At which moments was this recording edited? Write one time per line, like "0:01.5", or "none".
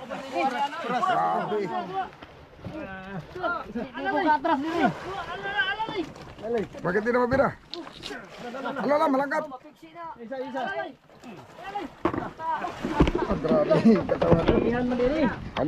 0:01.7